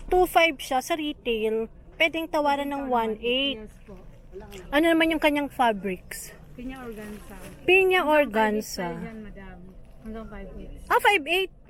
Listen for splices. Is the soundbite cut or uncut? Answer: uncut